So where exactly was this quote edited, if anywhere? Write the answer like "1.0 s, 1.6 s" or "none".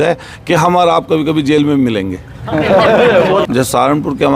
3.4 s